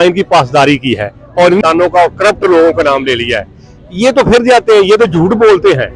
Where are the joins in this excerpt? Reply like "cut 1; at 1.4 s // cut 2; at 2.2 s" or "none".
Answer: cut 1; at 1.6 s